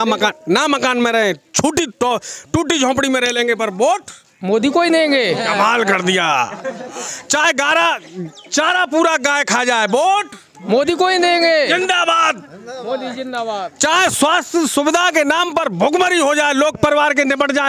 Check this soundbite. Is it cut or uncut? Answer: uncut